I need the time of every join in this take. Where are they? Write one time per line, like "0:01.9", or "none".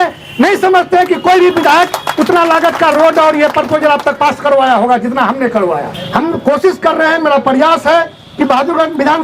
0:05.9